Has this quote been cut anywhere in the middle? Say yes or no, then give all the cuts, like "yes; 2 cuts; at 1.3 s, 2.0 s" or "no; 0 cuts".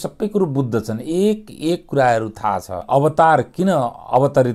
yes; 1 cut; at 2.8 s